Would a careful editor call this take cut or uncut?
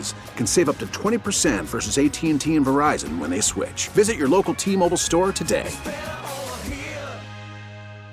uncut